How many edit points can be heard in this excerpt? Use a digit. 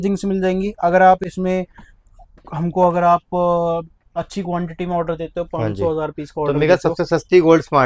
0